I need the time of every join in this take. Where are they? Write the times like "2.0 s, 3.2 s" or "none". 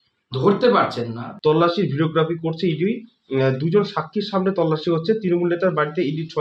1.2 s